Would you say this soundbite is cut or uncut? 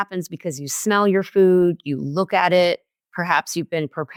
uncut